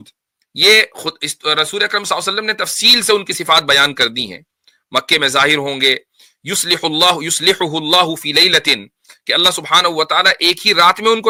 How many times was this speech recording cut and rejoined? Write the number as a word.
zero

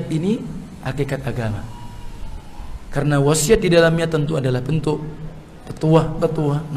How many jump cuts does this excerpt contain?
zero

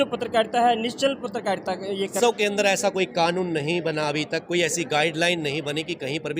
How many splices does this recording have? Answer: one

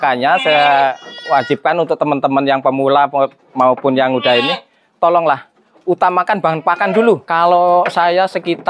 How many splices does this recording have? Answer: one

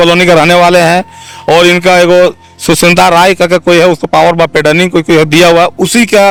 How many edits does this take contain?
zero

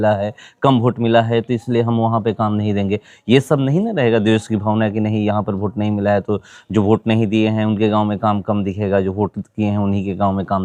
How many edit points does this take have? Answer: zero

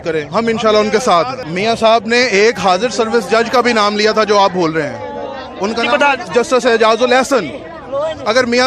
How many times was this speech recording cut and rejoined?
one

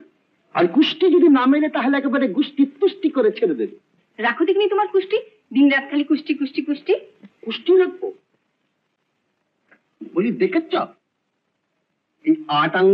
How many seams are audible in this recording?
zero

